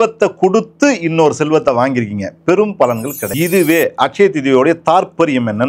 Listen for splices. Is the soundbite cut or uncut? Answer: cut